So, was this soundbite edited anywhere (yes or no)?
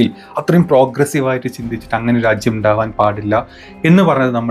no